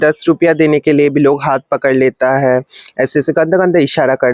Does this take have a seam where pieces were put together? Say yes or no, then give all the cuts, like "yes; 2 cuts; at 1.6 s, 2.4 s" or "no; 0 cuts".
no; 0 cuts